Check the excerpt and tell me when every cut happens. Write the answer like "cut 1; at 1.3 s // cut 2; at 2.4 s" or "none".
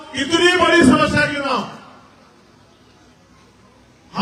none